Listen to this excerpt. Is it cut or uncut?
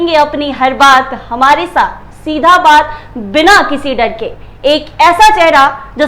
uncut